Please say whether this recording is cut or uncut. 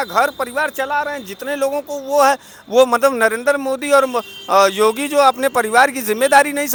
uncut